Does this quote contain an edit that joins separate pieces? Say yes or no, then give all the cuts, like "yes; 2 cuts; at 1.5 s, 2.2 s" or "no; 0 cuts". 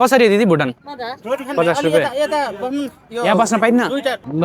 no; 0 cuts